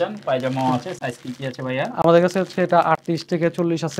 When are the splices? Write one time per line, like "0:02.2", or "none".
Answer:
none